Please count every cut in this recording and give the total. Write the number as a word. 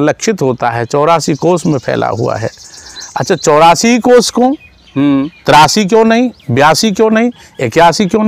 zero